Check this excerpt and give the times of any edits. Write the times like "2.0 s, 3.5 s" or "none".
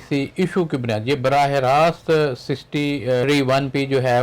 3.2 s